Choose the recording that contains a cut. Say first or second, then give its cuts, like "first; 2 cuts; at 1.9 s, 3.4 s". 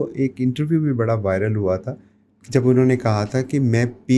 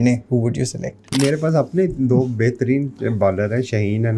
second; 1 cut; at 1.1 s